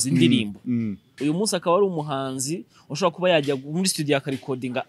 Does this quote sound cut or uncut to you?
cut